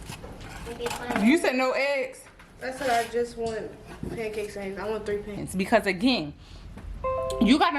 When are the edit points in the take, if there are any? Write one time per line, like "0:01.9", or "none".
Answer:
0:05.3